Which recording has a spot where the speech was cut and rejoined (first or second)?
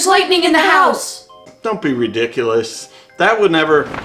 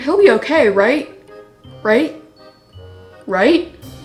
first